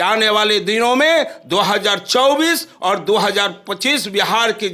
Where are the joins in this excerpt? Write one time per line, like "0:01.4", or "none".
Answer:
none